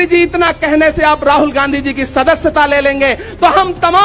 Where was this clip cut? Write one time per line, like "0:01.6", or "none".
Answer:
none